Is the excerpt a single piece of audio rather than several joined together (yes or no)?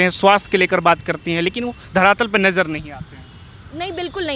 yes